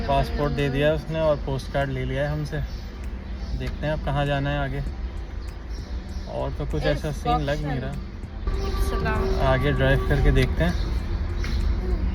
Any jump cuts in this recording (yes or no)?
no